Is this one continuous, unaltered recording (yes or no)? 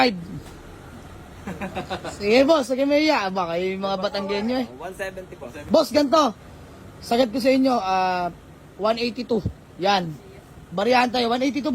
no